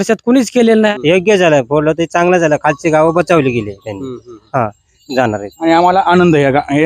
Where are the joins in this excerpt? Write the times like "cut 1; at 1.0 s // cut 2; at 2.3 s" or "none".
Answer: cut 1; at 0.9 s // cut 2; at 4.9 s